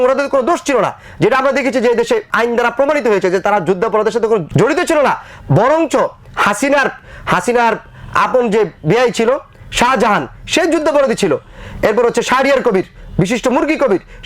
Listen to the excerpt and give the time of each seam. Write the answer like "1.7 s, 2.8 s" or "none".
2.3 s, 4.5 s